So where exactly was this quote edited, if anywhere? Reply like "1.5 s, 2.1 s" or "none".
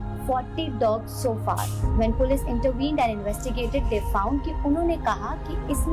none